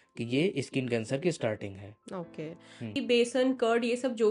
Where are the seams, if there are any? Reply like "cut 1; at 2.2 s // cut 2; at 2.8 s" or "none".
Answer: cut 1; at 3.0 s